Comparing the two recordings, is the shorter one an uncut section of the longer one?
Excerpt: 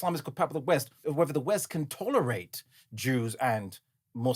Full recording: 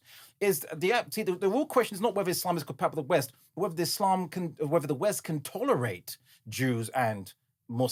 no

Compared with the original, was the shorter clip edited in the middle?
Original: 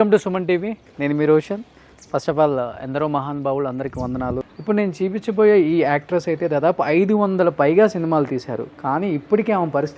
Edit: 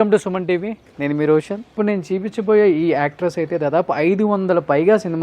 yes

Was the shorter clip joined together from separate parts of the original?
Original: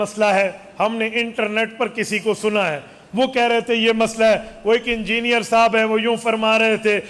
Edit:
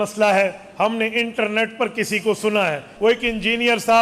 yes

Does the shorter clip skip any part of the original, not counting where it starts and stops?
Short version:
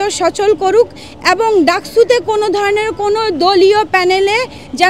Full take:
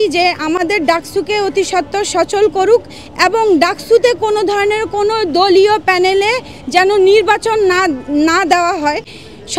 no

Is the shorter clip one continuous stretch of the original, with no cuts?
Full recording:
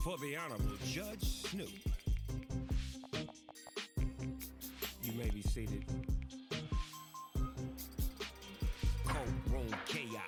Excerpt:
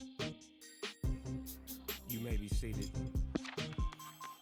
yes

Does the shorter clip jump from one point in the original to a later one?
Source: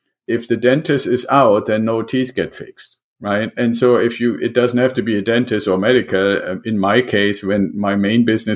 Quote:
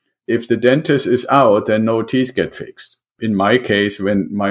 yes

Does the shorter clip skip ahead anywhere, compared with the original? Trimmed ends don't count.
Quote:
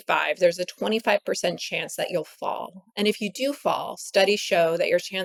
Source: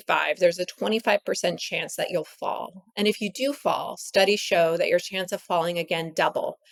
no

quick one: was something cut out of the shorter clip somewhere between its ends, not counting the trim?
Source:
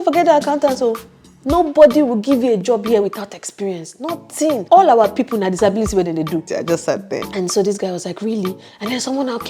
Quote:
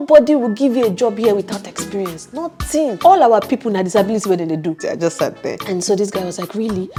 no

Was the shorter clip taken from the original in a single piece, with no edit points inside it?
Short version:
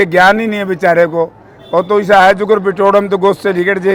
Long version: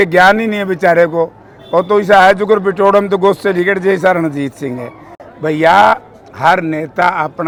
yes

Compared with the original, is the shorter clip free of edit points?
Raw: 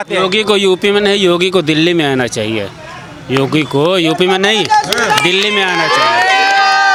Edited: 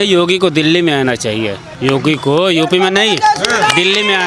no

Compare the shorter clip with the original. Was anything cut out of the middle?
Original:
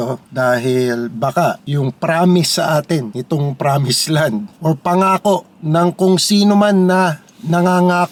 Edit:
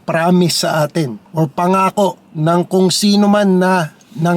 yes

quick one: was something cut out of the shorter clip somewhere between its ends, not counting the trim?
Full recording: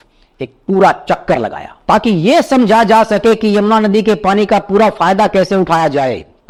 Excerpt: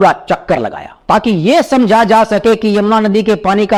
no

